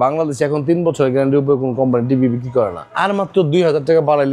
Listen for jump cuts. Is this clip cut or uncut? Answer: cut